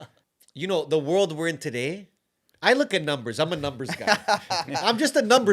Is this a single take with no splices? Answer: yes; 0 cuts

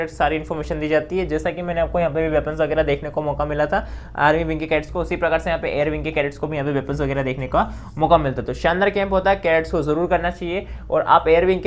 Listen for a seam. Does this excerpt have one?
no; 0 cuts

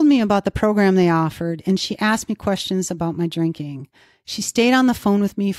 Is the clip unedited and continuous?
yes; 0 cuts

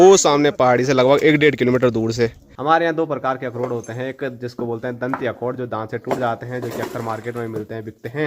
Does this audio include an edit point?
yes; 1 cut; at 2.5 s

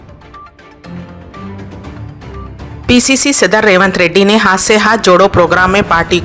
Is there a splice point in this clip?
yes; 1 cut; at 2.4 s

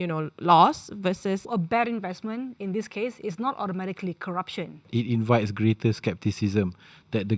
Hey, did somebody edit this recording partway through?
yes; 2 cuts; at 1.5 s, 4.9 s

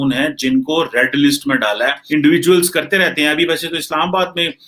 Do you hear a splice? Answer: no; 0 cuts

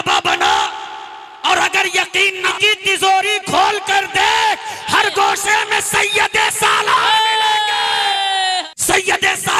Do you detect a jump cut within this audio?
yes; 2 cuts; at 2.5 s, 8.7 s

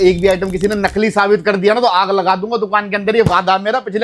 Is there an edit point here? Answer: no; 0 cuts

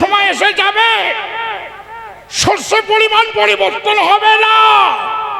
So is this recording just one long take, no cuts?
yes; 0 cuts

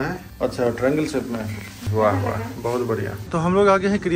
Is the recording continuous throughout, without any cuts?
no; 2 cuts; at 1.8 s, 3.2 s

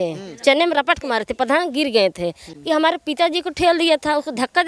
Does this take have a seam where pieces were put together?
yes; 1 cut; at 2.5 s

